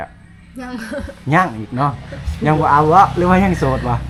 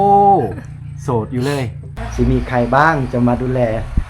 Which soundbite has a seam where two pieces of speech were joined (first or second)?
second